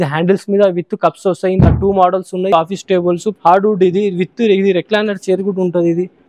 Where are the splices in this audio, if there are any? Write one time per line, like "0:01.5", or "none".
0:02.8